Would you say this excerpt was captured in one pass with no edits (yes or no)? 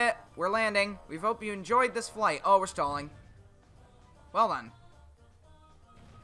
no